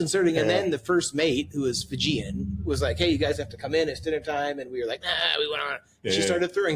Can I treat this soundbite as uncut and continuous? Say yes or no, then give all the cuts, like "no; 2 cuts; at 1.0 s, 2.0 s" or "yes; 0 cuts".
yes; 0 cuts